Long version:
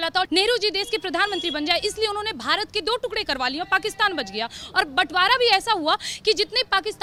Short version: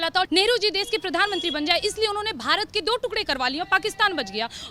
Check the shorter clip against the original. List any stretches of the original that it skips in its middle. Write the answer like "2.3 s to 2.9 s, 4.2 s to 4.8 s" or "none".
none